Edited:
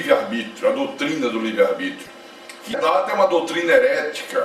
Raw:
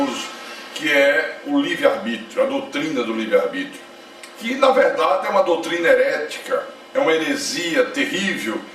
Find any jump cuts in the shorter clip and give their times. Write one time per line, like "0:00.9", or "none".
0:02.8